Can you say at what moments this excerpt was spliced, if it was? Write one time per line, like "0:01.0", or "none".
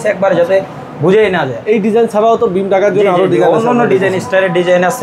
none